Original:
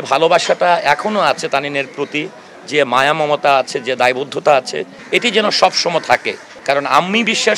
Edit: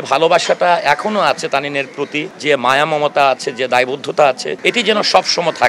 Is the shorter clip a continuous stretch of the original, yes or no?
no